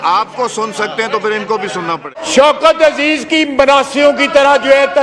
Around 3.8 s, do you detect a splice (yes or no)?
no